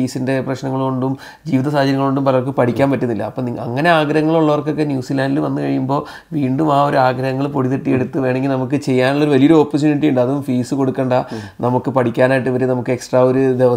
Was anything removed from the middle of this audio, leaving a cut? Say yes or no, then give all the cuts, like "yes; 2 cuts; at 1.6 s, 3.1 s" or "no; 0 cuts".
no; 0 cuts